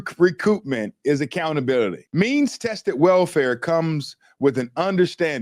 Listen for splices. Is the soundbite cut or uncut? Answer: cut